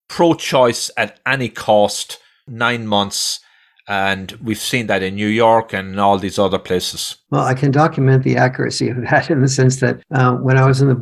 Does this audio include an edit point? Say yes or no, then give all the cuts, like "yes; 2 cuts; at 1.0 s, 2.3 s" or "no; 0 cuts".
yes; 1 cut; at 10.0 s